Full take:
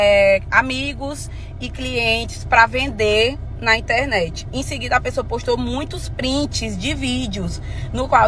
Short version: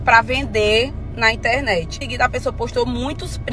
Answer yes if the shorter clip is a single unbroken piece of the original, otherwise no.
no